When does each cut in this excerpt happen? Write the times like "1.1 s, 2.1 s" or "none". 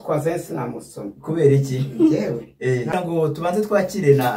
2.9 s